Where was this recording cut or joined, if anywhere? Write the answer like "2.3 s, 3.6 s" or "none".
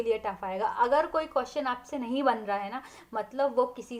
none